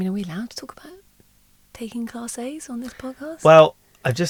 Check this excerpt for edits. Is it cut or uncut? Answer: uncut